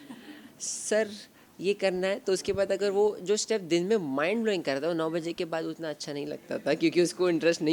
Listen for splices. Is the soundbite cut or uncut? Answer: uncut